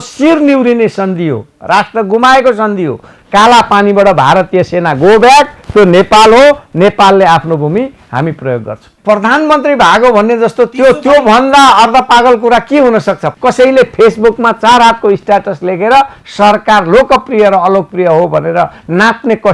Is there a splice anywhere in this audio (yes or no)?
yes